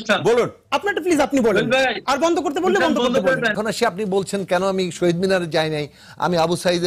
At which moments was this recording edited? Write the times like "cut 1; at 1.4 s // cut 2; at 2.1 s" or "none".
cut 1; at 3.5 s

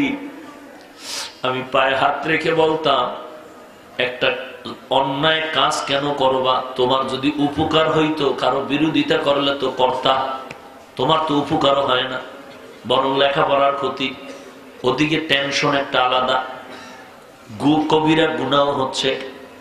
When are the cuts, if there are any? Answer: none

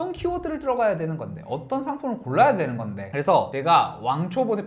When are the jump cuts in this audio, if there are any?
cut 1; at 3.1 s

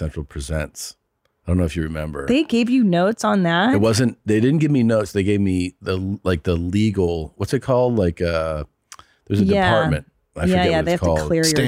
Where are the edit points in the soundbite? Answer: none

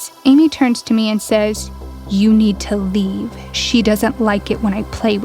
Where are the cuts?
none

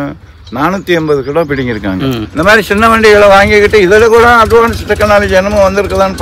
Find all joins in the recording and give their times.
cut 1; at 2.2 s

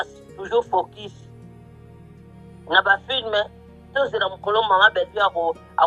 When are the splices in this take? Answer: none

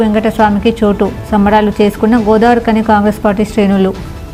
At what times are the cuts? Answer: none

